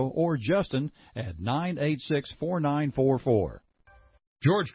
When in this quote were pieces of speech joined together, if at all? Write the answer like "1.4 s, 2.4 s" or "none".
3.7 s